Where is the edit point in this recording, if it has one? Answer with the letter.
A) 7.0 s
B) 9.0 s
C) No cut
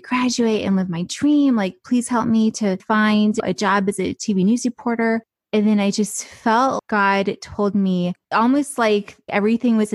C